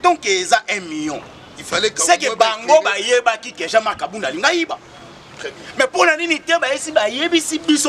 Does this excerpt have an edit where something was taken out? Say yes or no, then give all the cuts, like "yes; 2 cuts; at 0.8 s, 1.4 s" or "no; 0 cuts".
no; 0 cuts